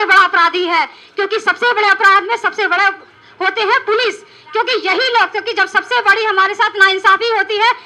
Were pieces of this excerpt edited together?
no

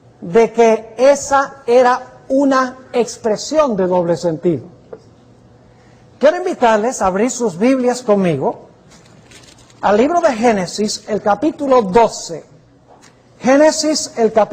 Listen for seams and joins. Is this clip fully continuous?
no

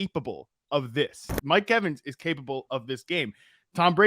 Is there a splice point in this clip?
yes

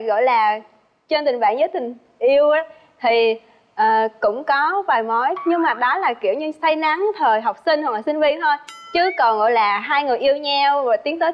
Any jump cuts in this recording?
no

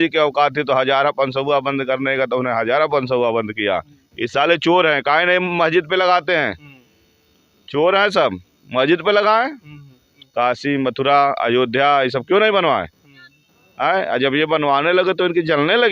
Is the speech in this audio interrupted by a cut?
yes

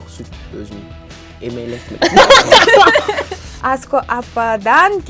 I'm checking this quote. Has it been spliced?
yes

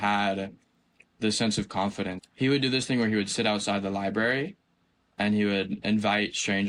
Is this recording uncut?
yes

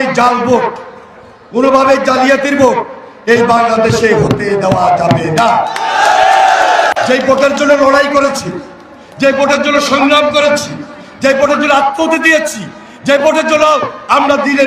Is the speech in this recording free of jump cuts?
yes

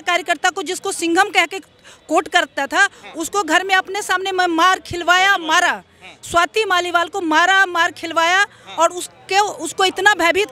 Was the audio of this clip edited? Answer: no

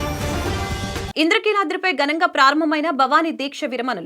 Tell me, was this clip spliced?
no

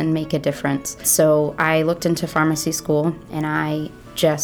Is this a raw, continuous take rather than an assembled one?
no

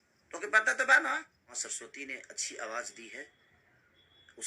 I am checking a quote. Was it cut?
yes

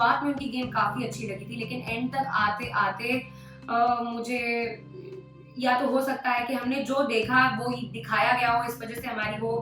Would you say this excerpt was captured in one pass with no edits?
yes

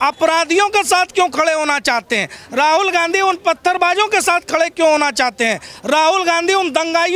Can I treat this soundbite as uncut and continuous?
yes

